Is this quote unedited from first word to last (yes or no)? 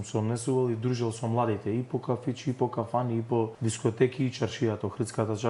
no